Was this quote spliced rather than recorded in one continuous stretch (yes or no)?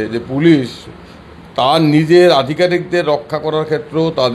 no